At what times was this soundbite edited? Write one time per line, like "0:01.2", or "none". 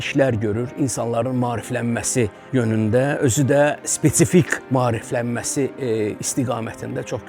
0:02.4
0:04.6